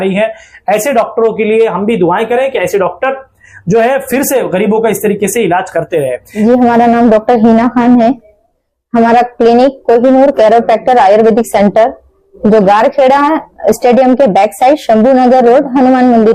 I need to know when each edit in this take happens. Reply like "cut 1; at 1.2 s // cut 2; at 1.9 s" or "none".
cut 1; at 6.4 s